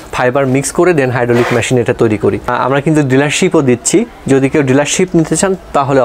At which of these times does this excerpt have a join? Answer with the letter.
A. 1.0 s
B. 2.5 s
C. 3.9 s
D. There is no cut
B